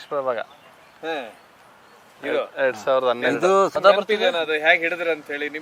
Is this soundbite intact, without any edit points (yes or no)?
yes